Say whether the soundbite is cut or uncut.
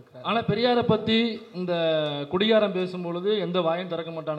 uncut